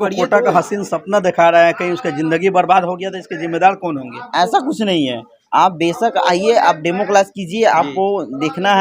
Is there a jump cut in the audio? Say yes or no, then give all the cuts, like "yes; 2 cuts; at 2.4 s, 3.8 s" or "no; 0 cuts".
no; 0 cuts